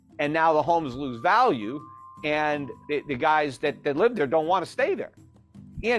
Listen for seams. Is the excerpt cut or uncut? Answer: cut